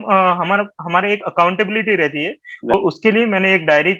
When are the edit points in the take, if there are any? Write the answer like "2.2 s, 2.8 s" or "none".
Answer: 2.7 s